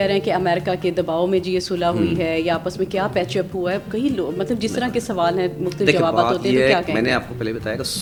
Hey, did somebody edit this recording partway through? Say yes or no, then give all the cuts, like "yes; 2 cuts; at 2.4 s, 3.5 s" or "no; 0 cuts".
no; 0 cuts